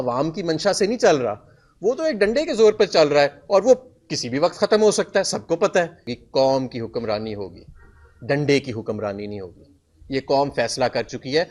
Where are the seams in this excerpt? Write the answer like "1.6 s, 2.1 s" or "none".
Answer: 6.1 s